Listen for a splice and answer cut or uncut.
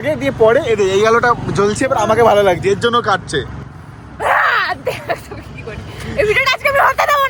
uncut